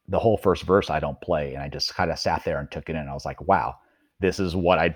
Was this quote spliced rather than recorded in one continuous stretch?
no; 0 cuts

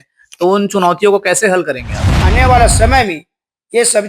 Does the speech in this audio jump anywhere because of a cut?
yes; 1 cut; at 2.2 s

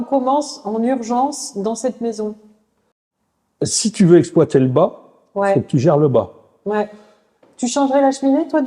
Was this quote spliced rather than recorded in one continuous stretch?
no; 0 cuts

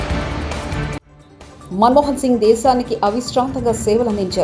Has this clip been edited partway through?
yes; 1 cut; at 1.1 s

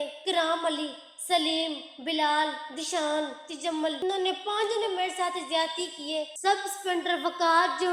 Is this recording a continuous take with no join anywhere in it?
no; 1 cut; at 6.3 s

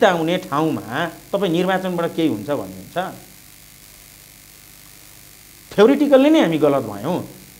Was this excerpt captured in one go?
yes; 0 cuts

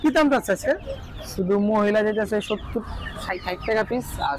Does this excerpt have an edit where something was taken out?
no; 0 cuts

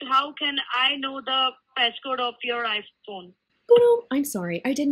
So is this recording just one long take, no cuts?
yes; 0 cuts

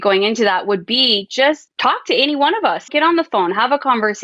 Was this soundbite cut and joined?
no; 0 cuts

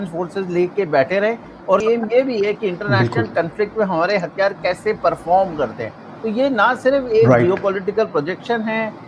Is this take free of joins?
no; 1 cut; at 1.8 s

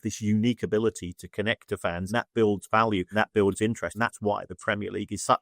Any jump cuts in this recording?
yes; 3 cuts; at 2.1 s, 3.1 s, 3.9 s

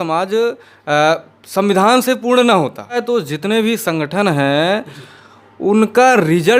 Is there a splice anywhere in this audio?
yes; 1 cut; at 3.0 s

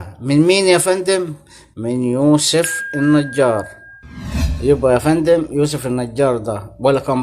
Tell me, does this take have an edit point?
no; 0 cuts

